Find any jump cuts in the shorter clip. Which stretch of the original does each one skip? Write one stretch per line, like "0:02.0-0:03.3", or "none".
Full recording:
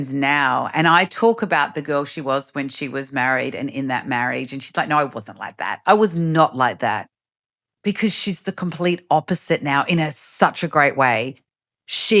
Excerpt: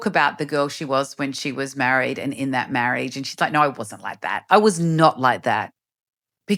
none